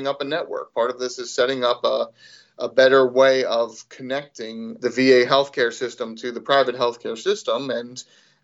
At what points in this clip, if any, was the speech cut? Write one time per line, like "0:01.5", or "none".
0:04.7